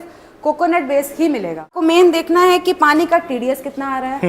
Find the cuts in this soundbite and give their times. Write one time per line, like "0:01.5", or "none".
0:01.8

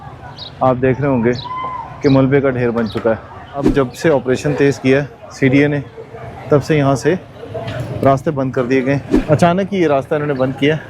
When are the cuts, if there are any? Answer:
0:03.7
0:09.1

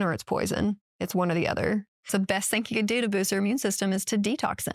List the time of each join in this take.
0:02.0

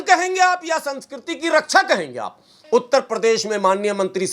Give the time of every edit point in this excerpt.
0:02.5

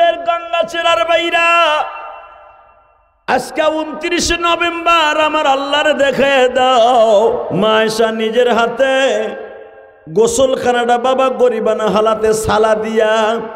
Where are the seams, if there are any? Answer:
0:07.5

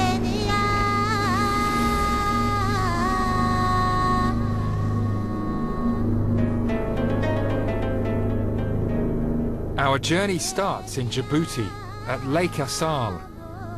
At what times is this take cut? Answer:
0:05.1

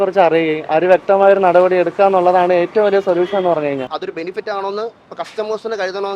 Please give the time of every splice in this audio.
0:03.9

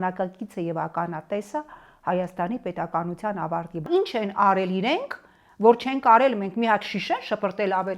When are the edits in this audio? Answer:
0:03.8

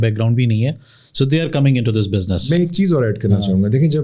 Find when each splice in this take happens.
none

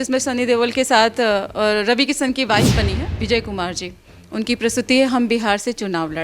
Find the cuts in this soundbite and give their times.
0:03.1

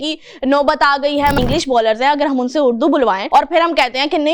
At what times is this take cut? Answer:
0:01.4
0:03.2

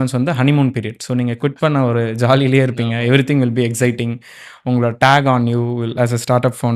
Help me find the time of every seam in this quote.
none

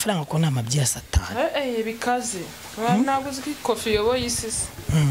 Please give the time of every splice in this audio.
none

